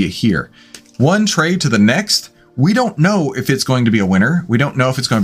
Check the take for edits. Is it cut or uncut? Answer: uncut